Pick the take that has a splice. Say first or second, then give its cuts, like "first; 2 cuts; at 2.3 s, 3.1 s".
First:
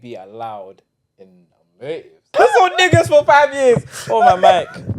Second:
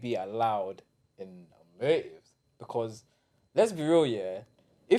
first; 1 cut; at 2.3 s